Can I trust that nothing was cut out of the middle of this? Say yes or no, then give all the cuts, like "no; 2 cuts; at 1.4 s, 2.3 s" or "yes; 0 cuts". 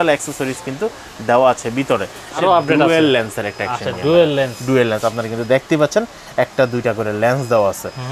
no; 1 cut; at 2.3 s